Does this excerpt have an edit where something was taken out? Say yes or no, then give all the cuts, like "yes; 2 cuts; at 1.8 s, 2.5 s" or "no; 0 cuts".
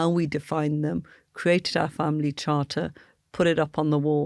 no; 0 cuts